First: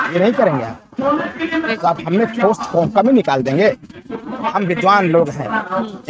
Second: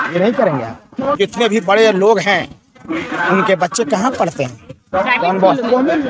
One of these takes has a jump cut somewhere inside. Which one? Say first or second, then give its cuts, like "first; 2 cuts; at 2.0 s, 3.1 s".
second; 1 cut; at 1.1 s